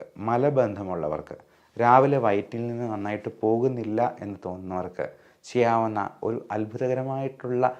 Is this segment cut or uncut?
uncut